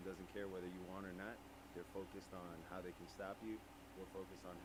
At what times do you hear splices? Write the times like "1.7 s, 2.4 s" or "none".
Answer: none